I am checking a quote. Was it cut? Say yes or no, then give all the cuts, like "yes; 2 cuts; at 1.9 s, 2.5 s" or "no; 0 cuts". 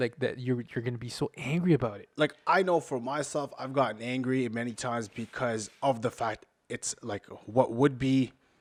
no; 0 cuts